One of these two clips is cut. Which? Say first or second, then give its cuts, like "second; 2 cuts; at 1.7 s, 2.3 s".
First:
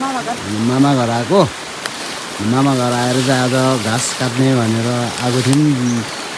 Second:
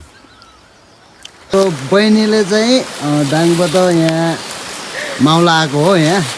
second; 1 cut; at 1.5 s